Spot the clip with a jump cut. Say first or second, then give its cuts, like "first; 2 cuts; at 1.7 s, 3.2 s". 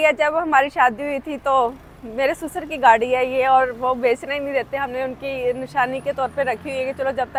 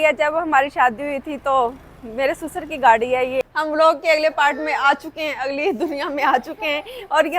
second; 1 cut; at 3.4 s